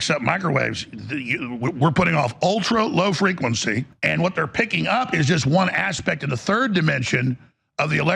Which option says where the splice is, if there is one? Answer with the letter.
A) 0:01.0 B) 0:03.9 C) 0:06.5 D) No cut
B